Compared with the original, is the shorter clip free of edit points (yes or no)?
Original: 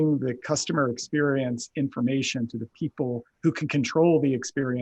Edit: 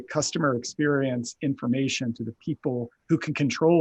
yes